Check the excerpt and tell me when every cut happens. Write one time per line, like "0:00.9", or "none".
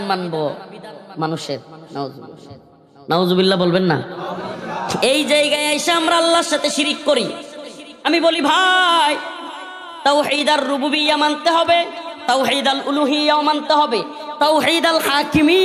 none